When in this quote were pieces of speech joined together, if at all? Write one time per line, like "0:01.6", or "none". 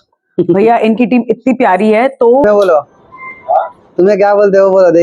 0:02.4